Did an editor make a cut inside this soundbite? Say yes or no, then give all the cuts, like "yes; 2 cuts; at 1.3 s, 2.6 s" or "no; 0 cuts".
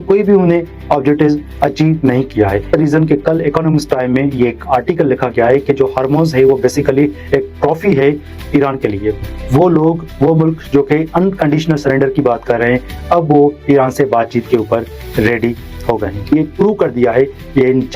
yes; 3 cuts; at 2.6 s, 9.3 s, 16.3 s